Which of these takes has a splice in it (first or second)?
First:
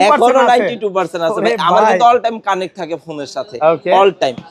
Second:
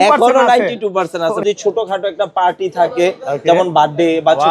second